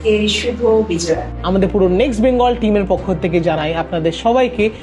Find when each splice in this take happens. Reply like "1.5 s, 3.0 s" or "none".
1.3 s